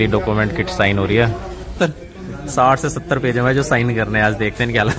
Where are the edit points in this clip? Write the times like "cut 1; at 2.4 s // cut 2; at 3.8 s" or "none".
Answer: cut 1; at 1.7 s